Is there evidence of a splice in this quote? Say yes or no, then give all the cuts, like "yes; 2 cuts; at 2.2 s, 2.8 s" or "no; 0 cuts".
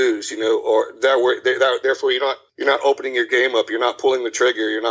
no; 0 cuts